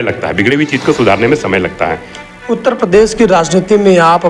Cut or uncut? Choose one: uncut